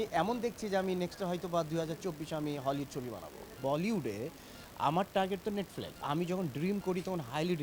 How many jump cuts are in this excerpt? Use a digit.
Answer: 2